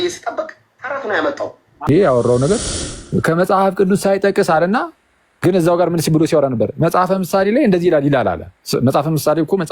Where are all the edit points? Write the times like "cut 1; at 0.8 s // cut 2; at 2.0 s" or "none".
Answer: cut 1; at 1.9 s